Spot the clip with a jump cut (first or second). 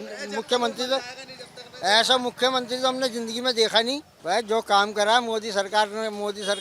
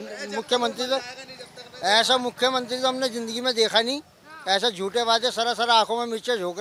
first